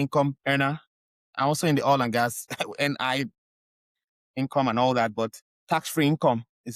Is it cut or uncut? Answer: uncut